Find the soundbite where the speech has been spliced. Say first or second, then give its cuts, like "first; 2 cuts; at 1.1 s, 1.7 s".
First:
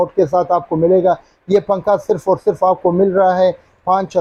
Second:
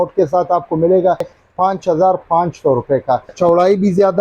second; 2 cuts; at 1.4 s, 3.3 s